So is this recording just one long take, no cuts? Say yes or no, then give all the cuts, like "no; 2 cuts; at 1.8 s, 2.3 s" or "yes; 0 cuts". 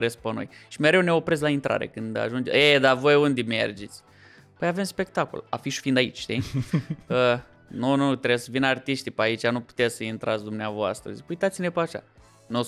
yes; 0 cuts